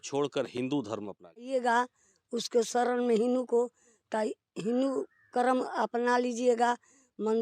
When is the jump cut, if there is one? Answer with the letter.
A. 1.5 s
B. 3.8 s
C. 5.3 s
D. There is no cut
A